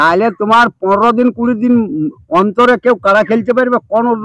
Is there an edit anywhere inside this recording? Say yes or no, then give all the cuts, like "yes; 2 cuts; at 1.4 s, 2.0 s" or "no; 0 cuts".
no; 0 cuts